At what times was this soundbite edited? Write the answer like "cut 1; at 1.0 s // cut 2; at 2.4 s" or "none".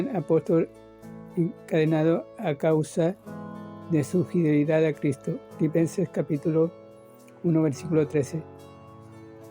cut 1; at 8.4 s